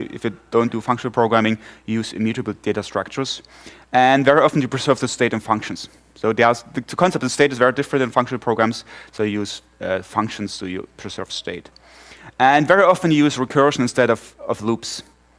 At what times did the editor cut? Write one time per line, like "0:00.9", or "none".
none